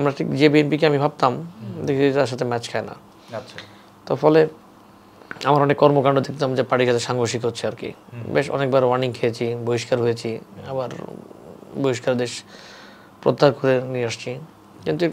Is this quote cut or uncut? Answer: uncut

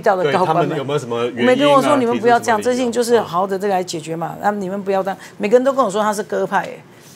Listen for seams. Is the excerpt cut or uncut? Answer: uncut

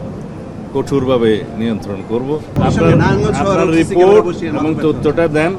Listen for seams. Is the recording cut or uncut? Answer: cut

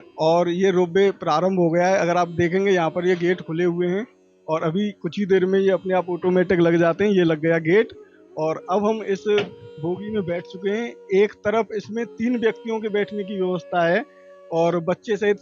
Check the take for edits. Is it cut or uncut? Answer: uncut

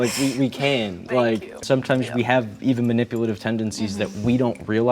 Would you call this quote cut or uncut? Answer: cut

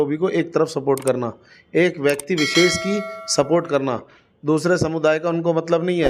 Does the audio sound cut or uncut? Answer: uncut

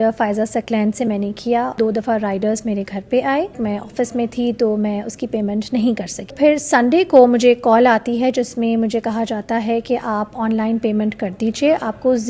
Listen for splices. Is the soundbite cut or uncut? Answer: cut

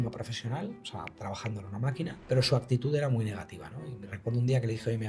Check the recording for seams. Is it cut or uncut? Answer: cut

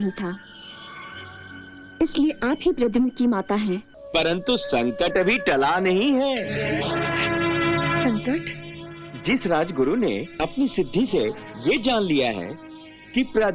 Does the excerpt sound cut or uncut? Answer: cut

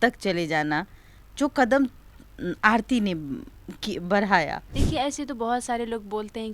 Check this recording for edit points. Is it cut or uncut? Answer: cut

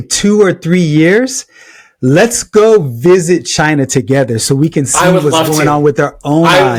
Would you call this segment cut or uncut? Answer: uncut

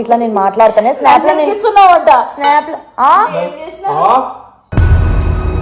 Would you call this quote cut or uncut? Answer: uncut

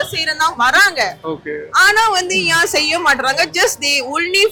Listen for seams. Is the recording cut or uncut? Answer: uncut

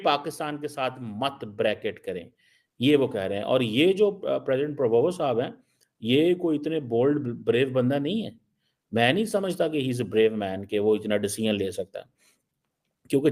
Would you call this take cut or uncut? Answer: uncut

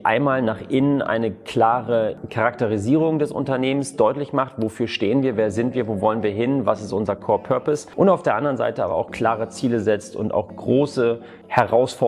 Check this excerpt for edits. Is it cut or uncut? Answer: uncut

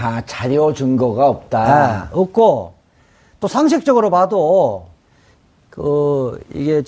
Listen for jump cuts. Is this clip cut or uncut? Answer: cut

